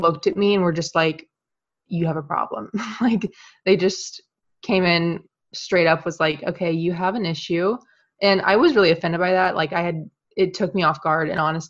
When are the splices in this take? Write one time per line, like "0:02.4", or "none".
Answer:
none